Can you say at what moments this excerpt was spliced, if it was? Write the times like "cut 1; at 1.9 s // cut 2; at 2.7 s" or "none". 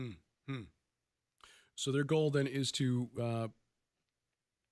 none